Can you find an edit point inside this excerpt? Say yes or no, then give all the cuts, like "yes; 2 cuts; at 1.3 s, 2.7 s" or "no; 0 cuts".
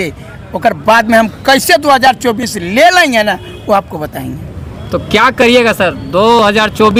no; 0 cuts